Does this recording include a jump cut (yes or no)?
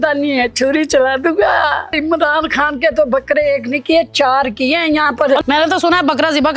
yes